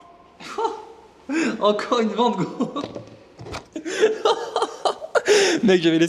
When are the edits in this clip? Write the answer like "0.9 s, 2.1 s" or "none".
none